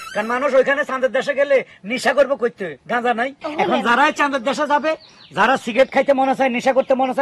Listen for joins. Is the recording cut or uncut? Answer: uncut